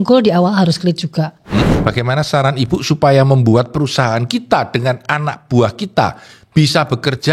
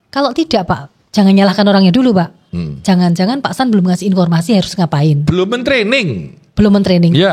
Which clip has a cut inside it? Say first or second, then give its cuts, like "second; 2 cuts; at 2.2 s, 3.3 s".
first; 1 cut; at 1.7 s